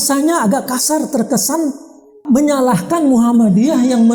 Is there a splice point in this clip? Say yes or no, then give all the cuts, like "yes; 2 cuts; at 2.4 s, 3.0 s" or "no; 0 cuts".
no; 0 cuts